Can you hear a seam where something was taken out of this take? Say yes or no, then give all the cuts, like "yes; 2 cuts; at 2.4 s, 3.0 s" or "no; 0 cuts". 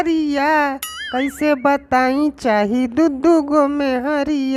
no; 0 cuts